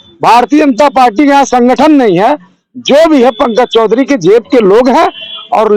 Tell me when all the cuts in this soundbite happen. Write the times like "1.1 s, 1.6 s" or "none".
none

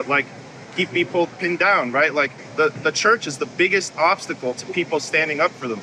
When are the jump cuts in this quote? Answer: 2.4 s

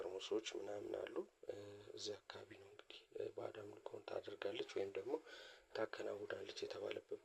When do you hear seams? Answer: none

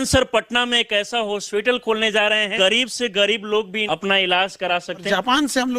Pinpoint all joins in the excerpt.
2.5 s, 3.8 s, 5.0 s

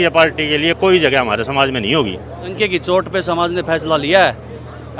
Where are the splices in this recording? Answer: 2.5 s

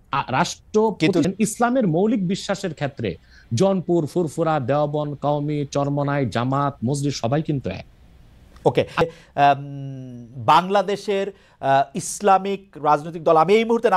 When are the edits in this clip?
1.2 s, 9.0 s

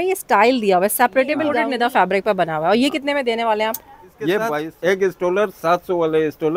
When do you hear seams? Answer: 1.6 s, 4.7 s

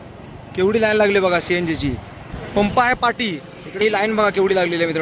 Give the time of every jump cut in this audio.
2.3 s, 3.8 s

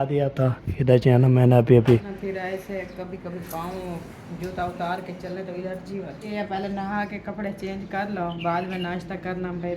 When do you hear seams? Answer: 2.2 s, 6.3 s

